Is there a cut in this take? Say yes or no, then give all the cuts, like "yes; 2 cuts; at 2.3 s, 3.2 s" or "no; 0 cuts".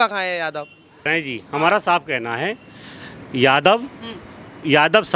no; 0 cuts